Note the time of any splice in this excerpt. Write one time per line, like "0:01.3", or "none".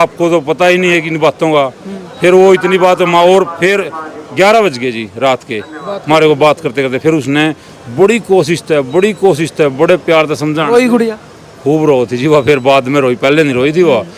none